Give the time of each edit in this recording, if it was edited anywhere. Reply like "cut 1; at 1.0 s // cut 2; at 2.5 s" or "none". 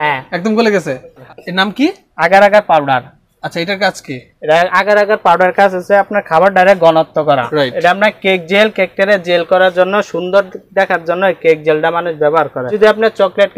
cut 1; at 1.3 s // cut 2; at 7.5 s // cut 3; at 12.7 s

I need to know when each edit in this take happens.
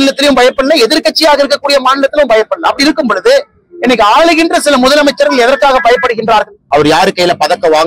cut 1; at 6.6 s

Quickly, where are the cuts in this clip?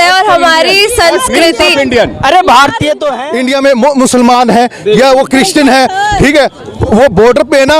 cut 1; at 3.1 s

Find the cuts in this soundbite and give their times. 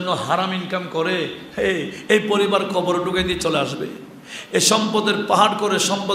none

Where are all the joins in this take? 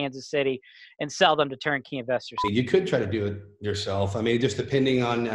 cut 1; at 2.4 s

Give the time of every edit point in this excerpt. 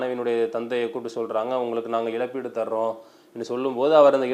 none

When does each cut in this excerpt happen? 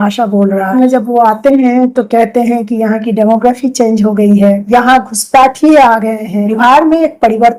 cut 1; at 0.7 s // cut 2; at 4.6 s // cut 3; at 6.5 s

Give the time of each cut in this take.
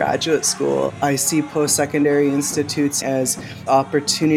cut 1; at 0.9 s // cut 2; at 3.0 s

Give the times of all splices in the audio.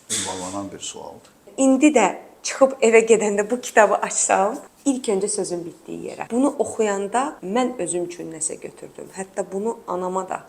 cut 1; at 1.5 s // cut 2; at 4.7 s // cut 3; at 6.2 s // cut 4; at 7.4 s

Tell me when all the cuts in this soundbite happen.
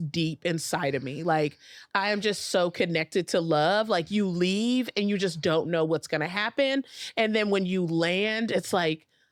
none

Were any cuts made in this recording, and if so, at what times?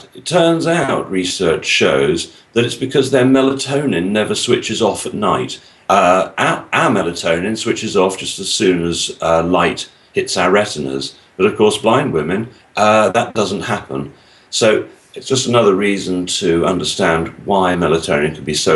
none

